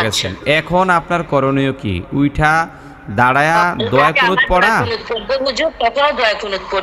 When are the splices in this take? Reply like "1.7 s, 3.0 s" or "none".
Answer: none